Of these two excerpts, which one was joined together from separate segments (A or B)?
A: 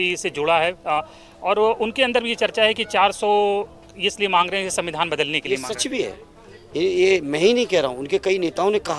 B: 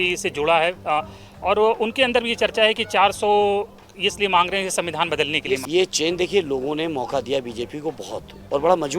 B